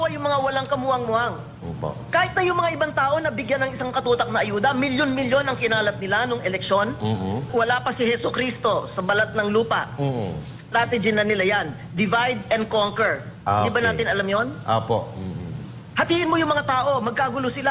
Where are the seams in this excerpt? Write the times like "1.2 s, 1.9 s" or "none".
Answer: 7.5 s